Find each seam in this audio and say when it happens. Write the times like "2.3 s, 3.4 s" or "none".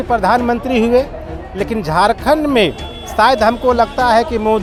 none